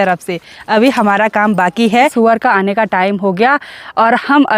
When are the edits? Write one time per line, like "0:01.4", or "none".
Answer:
0:02.1